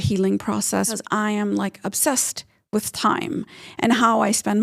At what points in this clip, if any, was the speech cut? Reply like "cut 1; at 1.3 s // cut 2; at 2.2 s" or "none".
cut 1; at 1.0 s